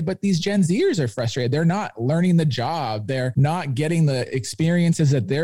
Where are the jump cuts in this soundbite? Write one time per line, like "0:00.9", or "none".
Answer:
0:03.3